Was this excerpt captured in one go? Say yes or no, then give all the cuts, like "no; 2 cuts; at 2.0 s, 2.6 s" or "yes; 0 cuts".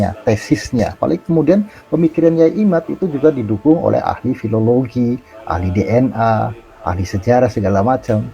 no; 1 cut; at 0.9 s